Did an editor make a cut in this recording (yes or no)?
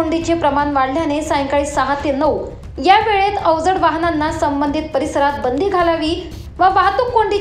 no